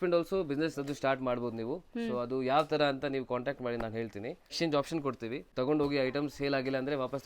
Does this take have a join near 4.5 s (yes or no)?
yes